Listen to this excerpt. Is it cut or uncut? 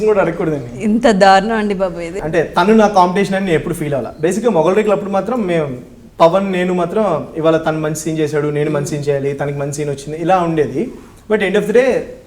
cut